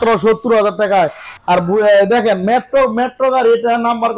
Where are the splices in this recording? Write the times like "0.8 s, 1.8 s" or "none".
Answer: 1.3 s